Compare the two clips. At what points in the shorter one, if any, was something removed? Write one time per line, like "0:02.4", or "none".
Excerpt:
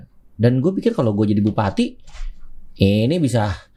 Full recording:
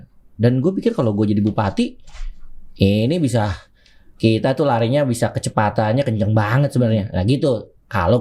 none